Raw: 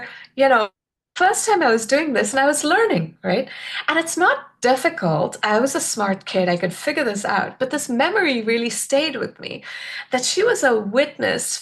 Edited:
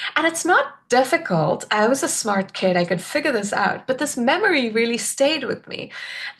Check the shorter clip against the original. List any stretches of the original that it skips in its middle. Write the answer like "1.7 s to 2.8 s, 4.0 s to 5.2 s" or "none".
none